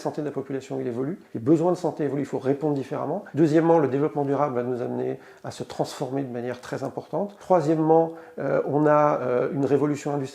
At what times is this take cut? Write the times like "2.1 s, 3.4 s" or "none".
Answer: 1.2 s, 3.2 s, 7.4 s